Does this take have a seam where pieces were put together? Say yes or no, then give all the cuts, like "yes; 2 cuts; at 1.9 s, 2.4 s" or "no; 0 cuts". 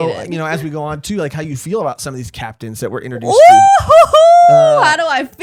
no; 0 cuts